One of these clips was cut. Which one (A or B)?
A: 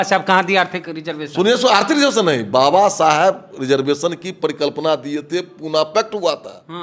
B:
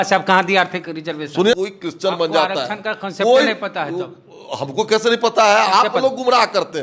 B